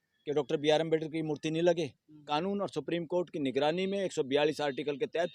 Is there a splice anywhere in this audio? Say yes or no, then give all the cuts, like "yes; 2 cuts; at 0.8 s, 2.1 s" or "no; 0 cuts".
yes; 1 cut; at 2.2 s